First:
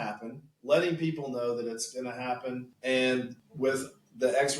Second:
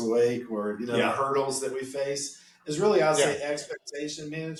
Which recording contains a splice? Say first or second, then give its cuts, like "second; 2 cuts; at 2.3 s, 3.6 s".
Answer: first; 2 cuts; at 2.7 s, 3.4 s